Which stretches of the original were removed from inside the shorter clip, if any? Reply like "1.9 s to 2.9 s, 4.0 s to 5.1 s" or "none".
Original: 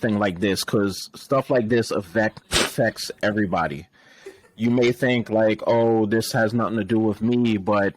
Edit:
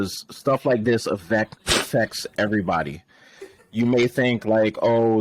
none

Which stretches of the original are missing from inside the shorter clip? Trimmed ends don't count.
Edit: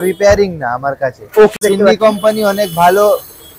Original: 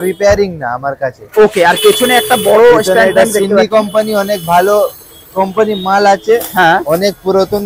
1.6 s to 3.3 s

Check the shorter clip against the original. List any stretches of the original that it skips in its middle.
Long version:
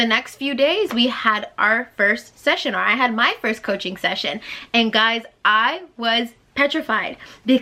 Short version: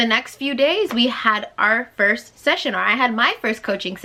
none

